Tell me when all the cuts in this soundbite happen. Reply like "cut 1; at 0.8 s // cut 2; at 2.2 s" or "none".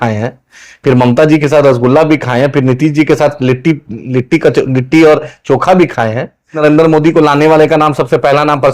cut 1; at 6.6 s